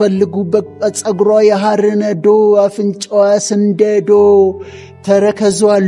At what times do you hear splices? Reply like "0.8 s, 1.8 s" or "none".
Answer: none